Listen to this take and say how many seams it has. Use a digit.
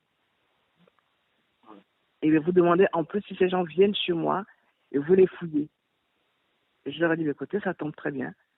1